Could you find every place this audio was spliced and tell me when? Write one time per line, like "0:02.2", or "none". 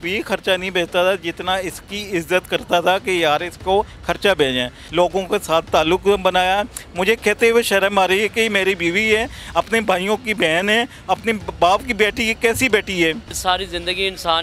0:04.8
0:13.3

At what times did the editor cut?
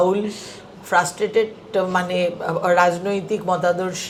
none

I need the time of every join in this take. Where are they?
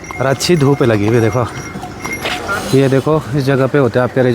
0:02.0

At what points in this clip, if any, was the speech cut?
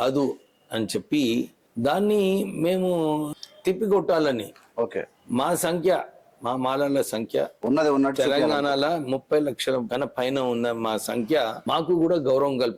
0:01.6
0:03.3
0:09.9
0:11.6

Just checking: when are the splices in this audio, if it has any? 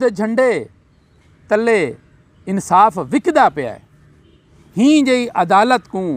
none

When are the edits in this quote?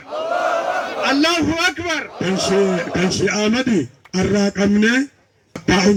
none

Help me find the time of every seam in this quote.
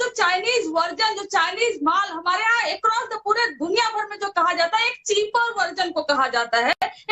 none

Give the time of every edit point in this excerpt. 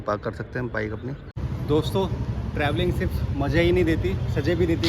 0:01.5

